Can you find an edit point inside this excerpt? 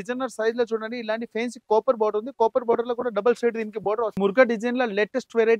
yes; 1 cut; at 4.2 s

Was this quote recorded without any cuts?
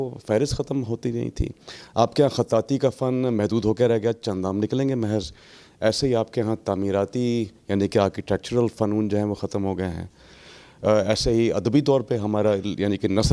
yes; 0 cuts

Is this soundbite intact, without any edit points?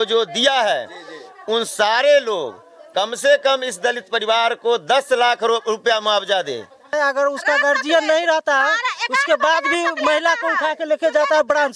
no; 1 cut; at 6.9 s

